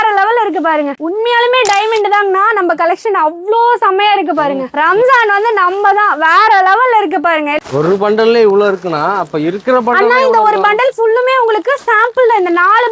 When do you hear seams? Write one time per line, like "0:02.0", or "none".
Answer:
0:00.9
0:07.6